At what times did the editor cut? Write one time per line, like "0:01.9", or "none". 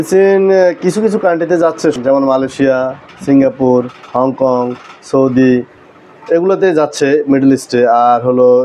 0:02.0